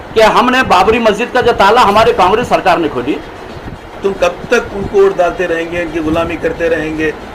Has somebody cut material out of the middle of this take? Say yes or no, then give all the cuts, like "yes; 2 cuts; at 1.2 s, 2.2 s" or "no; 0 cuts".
yes; 1 cut; at 3.8 s